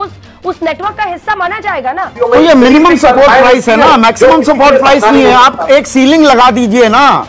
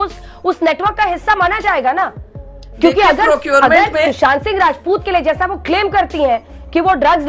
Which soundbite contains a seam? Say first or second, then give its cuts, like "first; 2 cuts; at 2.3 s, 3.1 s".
first; 1 cut; at 2.1 s